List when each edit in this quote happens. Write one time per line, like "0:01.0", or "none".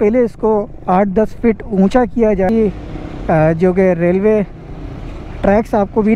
0:02.5